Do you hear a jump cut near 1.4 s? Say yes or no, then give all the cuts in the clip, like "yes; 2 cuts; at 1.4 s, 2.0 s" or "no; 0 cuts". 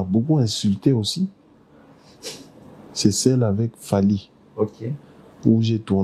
no; 0 cuts